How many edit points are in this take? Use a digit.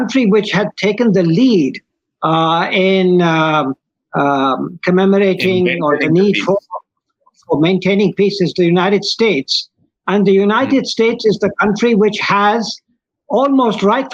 0